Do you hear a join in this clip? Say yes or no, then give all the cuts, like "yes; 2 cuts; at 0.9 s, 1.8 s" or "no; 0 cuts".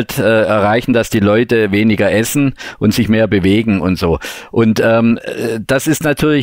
no; 0 cuts